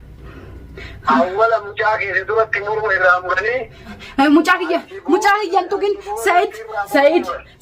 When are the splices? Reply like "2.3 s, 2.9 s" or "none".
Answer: 4.0 s